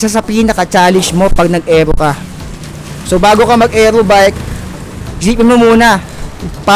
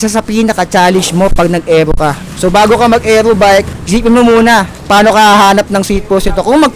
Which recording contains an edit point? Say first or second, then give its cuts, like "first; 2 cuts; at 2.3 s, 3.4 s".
second; 3 cuts; at 2.3 s, 3.8 s, 4.7 s